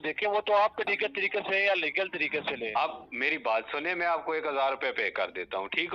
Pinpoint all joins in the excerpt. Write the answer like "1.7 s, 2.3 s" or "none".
0.9 s